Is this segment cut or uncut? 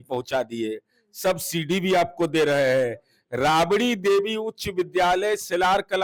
uncut